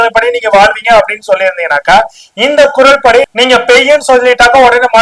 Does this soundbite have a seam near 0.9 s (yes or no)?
no